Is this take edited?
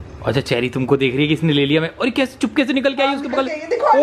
no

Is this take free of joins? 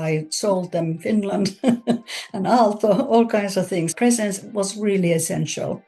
yes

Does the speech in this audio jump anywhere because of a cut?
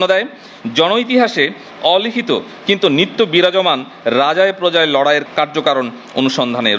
yes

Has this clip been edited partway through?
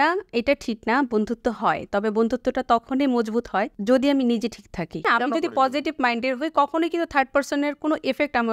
yes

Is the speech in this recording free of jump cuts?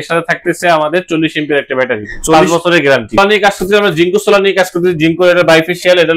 no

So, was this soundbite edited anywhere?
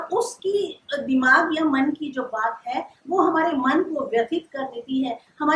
no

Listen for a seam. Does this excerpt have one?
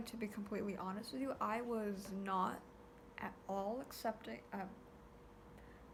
no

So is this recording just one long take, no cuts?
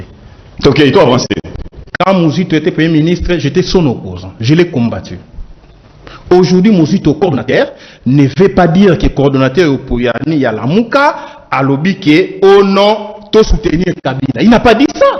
yes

